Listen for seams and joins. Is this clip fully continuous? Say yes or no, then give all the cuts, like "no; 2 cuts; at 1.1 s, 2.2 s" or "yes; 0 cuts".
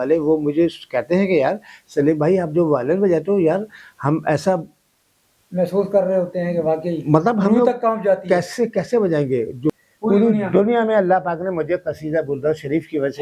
no; 1 cut; at 9.7 s